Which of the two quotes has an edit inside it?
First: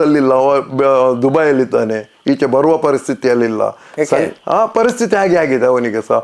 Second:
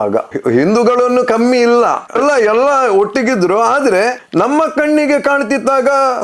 second; 2 cuts; at 2.1 s, 4.2 s

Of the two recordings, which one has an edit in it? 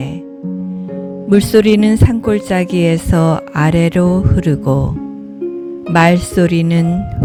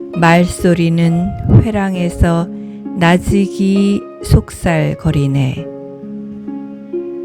second; 1 cut; at 5.6 s

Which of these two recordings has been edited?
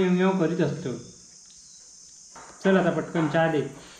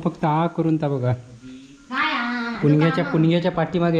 first; 1 cut; at 2.4 s

